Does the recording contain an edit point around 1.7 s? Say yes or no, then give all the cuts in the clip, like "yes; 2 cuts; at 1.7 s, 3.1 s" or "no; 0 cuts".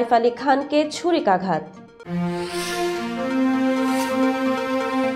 no; 0 cuts